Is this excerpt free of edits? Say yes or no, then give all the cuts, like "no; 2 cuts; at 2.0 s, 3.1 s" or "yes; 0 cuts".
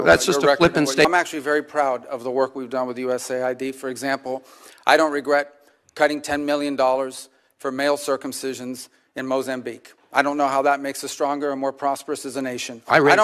no; 1 cut; at 1.0 s